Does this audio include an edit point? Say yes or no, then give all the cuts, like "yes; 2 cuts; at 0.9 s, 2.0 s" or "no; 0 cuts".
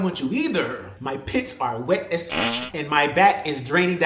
yes; 2 cuts; at 0.9 s, 2.4 s